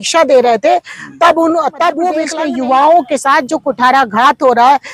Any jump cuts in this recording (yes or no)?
yes